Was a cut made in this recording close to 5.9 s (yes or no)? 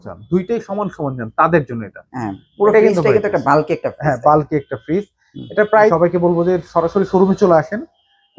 yes